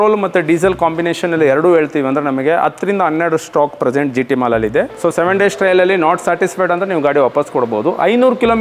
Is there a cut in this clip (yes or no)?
yes